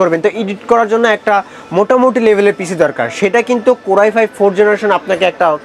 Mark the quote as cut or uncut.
uncut